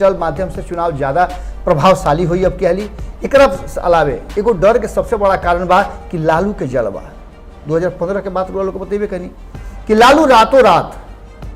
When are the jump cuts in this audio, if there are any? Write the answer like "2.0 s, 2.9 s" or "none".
none